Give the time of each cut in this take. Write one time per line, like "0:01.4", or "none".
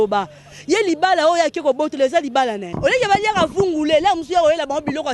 0:02.7